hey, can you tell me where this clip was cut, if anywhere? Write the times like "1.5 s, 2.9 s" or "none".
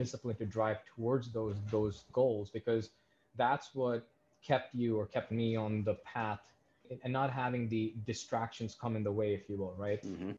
2.1 s, 6.9 s